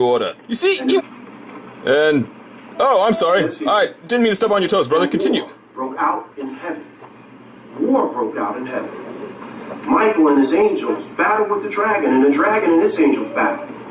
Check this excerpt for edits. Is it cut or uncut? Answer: uncut